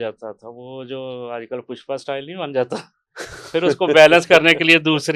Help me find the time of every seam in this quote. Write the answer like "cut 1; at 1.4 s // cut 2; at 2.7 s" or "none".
none